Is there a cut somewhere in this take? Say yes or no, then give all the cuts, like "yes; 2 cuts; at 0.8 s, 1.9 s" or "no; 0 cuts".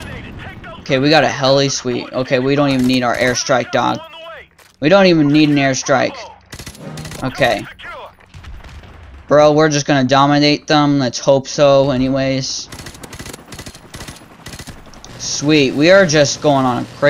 yes; 1 cut; at 12.7 s